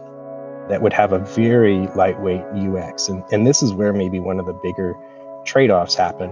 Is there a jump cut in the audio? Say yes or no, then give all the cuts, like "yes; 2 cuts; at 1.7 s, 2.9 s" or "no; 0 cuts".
no; 0 cuts